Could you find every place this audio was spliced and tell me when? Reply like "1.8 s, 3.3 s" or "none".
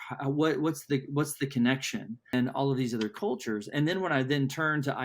2.3 s